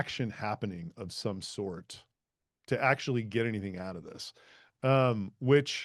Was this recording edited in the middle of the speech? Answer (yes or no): no